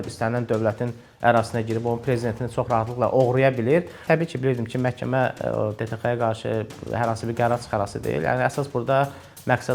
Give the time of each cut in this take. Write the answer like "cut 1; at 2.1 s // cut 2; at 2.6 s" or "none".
cut 1; at 4.0 s

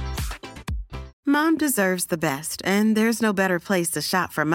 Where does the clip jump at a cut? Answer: cut 1; at 1.1 s

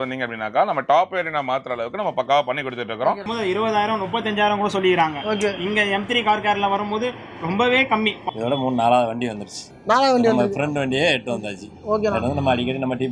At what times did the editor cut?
cut 1; at 3.3 s // cut 2; at 8.2 s

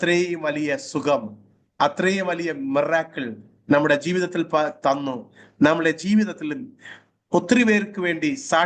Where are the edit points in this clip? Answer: none

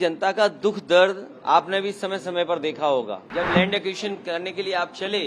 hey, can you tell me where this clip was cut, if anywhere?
cut 1; at 3.2 s

